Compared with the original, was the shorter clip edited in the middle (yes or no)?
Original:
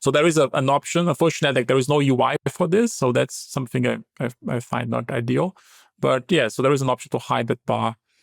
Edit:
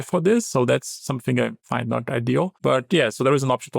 yes